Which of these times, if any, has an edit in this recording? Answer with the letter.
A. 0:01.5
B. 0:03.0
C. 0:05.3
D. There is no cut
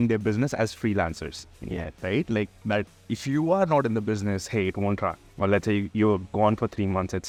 D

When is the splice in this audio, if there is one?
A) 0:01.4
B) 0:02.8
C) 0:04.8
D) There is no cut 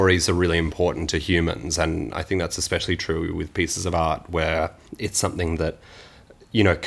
C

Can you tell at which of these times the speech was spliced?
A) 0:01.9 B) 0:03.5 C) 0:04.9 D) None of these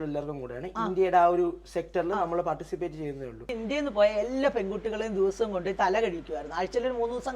B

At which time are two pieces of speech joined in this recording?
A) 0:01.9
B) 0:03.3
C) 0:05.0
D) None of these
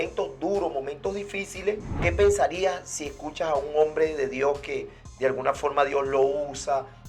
A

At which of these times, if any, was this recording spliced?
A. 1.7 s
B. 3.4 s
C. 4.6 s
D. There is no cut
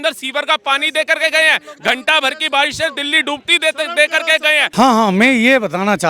C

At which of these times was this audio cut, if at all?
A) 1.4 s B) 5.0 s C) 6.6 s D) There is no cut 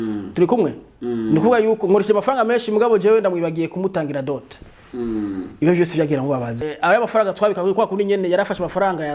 C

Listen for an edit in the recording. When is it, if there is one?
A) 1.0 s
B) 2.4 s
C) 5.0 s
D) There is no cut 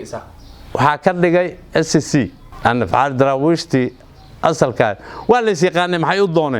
B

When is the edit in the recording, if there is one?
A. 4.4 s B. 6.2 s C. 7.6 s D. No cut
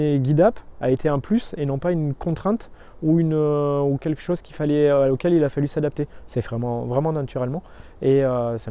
D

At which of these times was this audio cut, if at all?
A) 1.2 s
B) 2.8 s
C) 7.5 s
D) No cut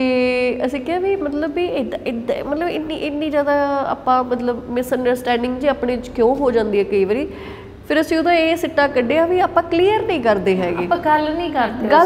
D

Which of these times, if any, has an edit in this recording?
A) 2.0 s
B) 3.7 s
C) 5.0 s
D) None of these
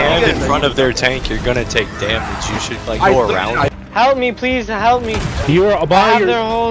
B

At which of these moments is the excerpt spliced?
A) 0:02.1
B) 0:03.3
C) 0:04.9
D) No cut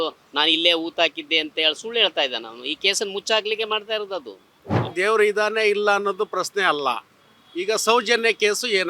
C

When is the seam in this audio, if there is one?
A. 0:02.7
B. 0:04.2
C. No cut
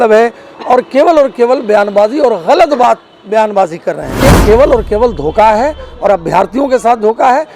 B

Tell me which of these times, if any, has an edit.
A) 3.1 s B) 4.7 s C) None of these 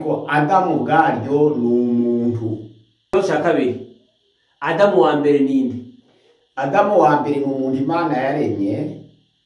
A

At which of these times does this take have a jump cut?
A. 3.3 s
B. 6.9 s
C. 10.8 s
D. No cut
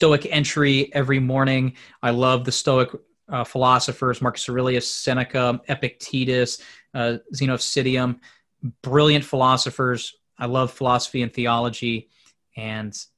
D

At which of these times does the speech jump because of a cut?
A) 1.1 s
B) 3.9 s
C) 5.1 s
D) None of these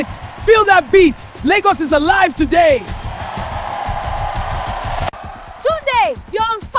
D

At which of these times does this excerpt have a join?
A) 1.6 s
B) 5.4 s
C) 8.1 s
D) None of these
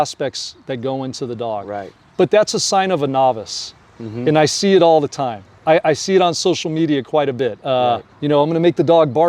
C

